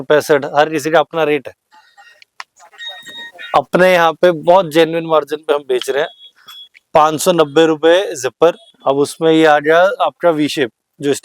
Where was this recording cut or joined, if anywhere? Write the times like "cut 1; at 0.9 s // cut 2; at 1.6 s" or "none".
cut 1; at 8.7 s